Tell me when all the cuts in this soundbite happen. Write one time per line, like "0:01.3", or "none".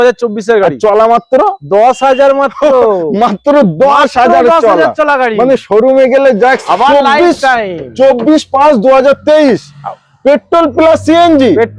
0:06.7